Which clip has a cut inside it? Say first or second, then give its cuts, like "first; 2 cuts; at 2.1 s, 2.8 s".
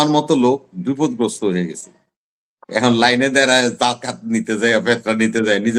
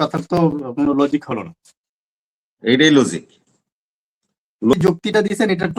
second; 1 cut; at 4.7 s